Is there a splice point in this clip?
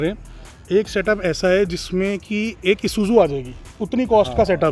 no; 0 cuts

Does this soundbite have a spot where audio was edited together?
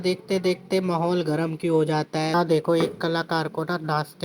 yes; 1 cut; at 2.3 s

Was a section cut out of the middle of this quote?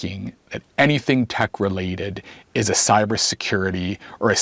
no; 0 cuts

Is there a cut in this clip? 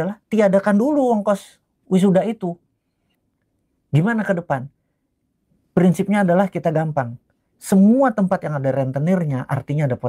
yes; 1 cut; at 3.0 s

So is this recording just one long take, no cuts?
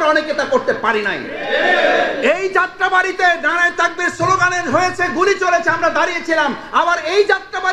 yes; 0 cuts

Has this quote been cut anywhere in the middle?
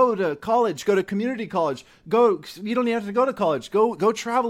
no; 0 cuts

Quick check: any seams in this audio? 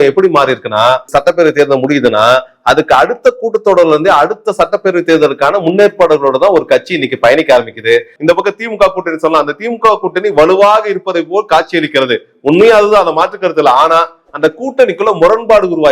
yes; 2 cuts; at 1.1 s, 8.1 s

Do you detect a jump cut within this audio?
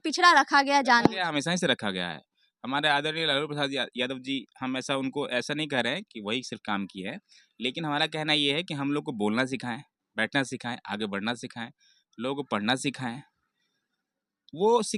no; 0 cuts

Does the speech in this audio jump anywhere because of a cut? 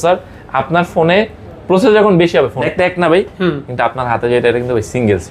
yes; 1 cut; at 2.6 s

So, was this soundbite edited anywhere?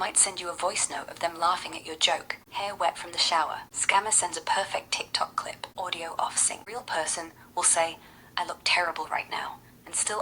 yes; 4 cuts; at 2.4 s, 3.7 s, 5.6 s, 6.6 s

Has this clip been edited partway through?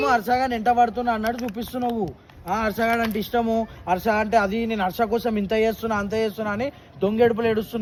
no; 0 cuts

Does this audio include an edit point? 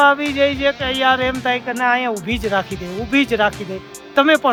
no; 0 cuts

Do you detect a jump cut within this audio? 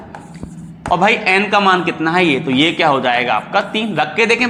no; 0 cuts

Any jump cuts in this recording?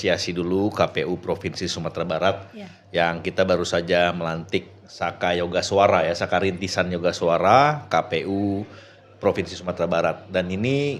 no; 0 cuts

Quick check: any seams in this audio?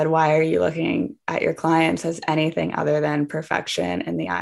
no; 0 cuts

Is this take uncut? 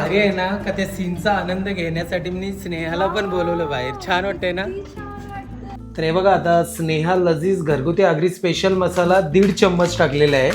no; 1 cut; at 5.7 s

